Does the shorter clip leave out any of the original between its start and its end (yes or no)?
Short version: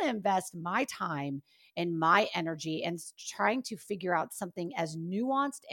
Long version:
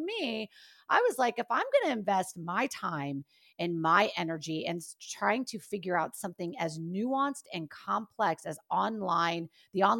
no